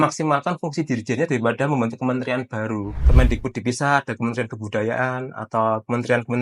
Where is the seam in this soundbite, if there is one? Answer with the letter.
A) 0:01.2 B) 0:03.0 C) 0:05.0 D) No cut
B